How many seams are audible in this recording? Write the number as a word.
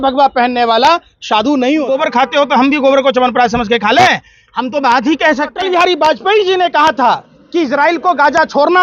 two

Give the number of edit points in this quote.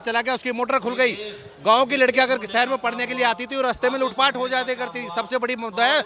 zero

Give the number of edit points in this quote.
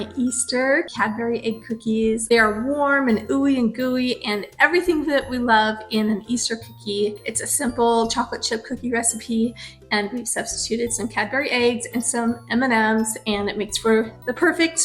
three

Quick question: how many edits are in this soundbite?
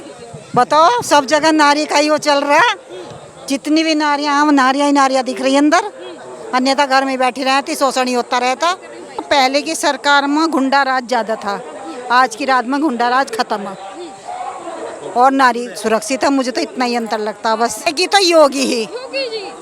two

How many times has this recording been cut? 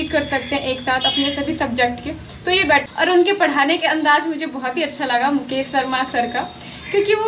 one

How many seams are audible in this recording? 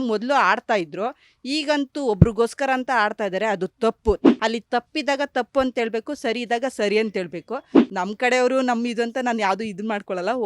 two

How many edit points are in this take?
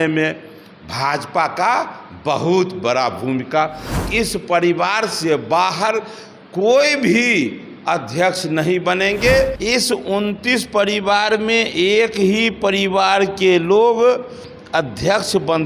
two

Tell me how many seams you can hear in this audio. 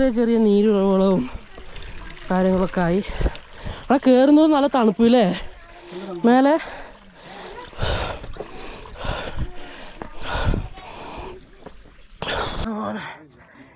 one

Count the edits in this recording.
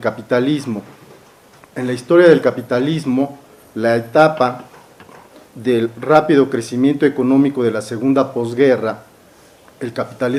zero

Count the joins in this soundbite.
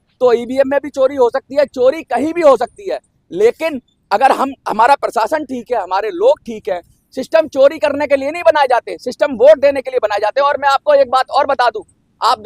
zero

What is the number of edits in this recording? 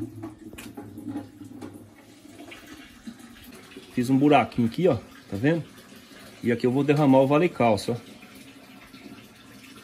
one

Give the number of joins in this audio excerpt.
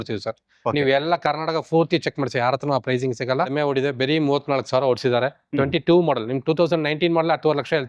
one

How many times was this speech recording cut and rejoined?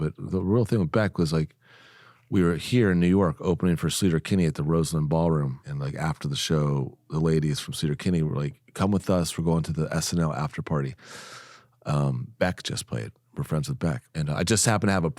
two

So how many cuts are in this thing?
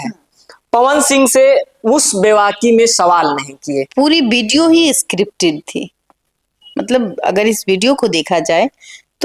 one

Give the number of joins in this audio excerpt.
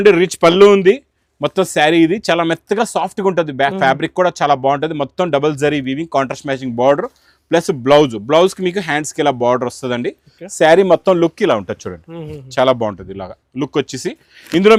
zero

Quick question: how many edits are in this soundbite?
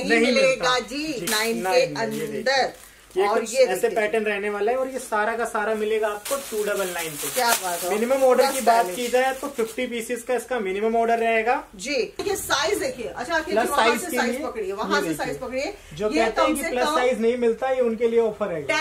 two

